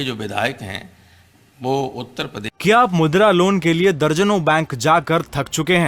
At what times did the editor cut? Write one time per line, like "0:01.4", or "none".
0:02.4